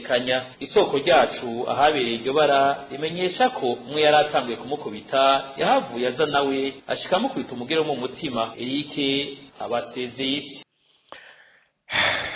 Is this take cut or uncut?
cut